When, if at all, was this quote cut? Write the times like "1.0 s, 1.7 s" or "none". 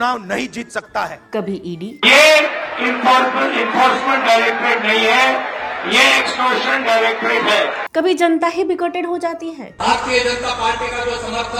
none